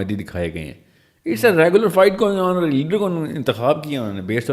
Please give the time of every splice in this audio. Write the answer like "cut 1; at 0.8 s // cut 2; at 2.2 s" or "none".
none